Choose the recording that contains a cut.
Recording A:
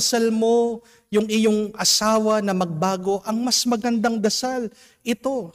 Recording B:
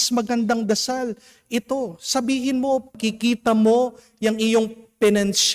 B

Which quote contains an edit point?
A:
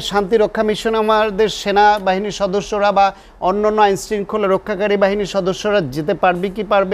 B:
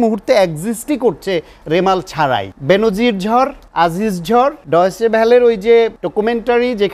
B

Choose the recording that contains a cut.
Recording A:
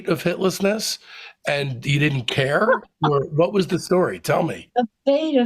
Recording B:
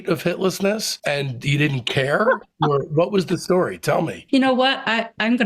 B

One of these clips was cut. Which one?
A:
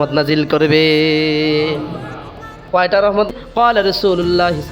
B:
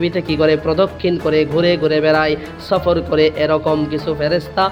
A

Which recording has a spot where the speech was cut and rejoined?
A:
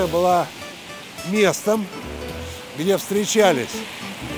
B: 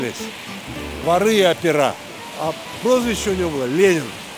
B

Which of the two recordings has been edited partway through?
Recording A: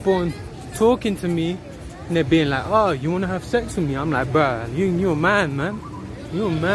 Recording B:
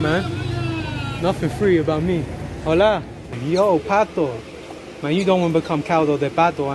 B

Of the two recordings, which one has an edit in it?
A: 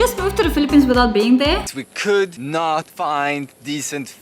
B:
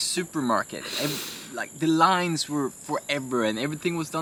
A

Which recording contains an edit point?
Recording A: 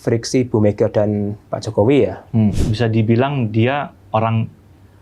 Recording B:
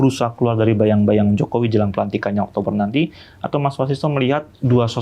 A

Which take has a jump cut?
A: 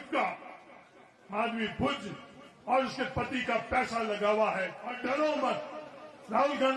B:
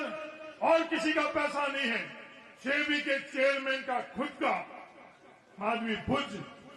A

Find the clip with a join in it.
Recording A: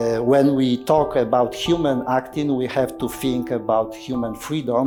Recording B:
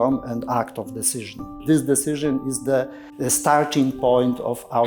B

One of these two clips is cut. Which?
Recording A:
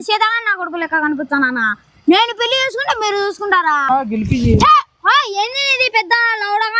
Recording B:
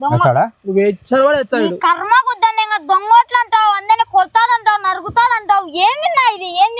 A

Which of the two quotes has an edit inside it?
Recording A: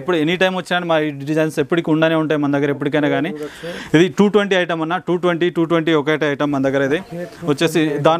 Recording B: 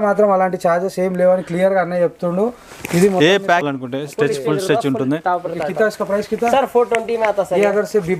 B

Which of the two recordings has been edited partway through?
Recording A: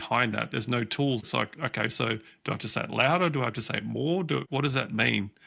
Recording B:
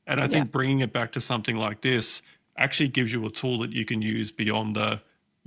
A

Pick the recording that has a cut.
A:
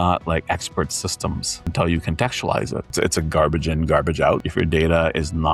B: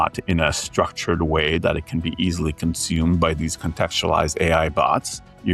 A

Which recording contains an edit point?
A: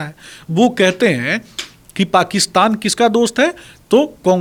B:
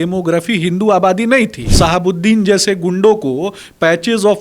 B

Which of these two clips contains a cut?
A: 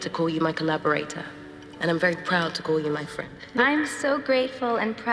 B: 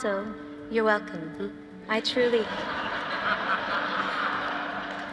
A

